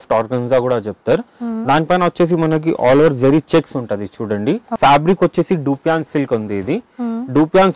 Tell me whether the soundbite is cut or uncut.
cut